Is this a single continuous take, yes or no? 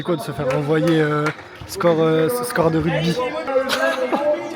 no